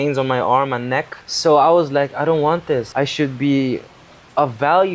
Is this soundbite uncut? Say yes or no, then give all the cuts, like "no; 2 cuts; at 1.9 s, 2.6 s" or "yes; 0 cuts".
no; 2 cuts; at 1.2 s, 2.9 s